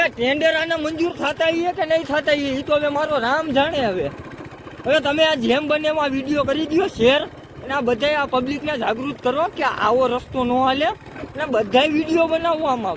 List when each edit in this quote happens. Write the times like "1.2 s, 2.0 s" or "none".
none